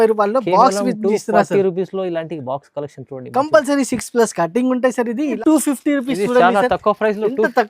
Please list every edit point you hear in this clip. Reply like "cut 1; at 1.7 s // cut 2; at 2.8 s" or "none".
cut 1; at 5.4 s